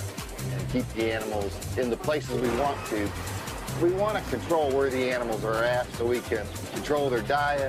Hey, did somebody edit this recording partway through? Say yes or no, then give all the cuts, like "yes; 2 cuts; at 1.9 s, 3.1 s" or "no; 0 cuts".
no; 0 cuts